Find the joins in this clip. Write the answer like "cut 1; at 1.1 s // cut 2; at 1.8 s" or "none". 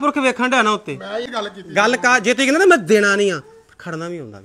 cut 1; at 1.3 s